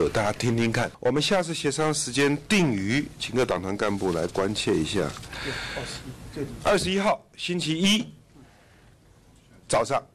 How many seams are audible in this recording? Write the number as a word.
one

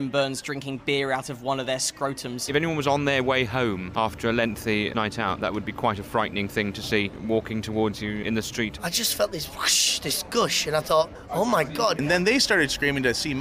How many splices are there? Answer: six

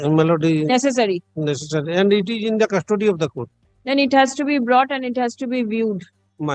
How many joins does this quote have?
zero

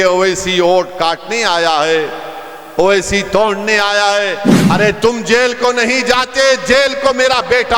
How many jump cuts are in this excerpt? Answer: one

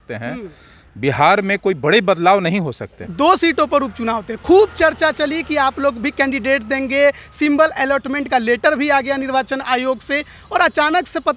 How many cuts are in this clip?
one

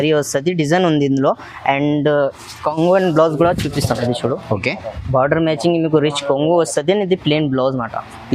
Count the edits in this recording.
zero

